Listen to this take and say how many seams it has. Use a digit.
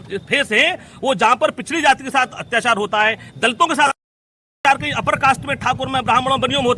1